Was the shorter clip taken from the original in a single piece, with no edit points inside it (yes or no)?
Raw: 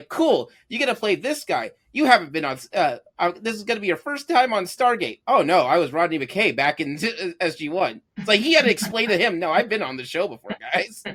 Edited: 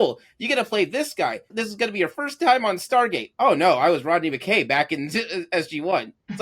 no